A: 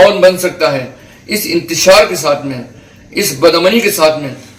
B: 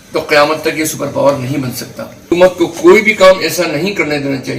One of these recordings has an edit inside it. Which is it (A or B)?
B